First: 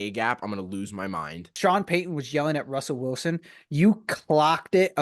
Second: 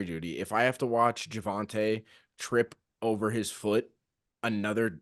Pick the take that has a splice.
first; 1 cut; at 1.4 s

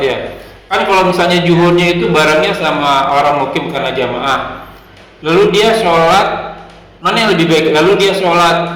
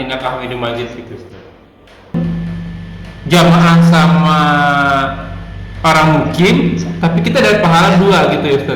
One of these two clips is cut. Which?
second; 1 cut; at 2.1 s

